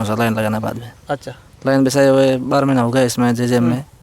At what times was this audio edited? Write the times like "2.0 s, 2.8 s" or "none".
none

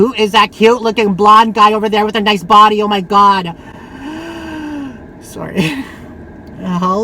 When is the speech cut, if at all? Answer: none

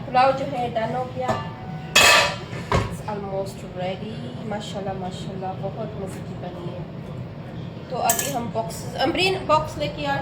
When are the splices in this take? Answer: none

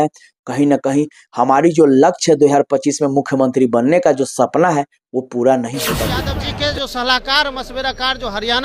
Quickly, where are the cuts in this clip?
6.4 s

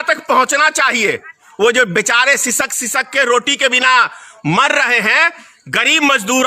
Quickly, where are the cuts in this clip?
1.4 s

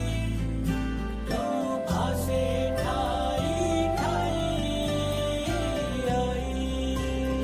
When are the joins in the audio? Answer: none

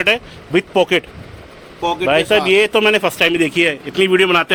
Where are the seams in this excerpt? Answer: none

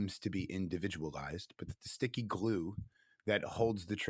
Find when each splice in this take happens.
none

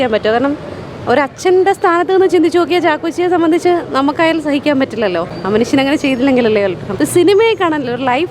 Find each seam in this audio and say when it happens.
5.3 s, 6.8 s

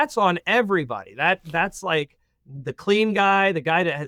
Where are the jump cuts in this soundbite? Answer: none

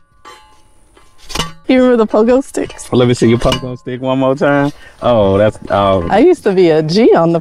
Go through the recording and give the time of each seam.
1.5 s, 2.8 s

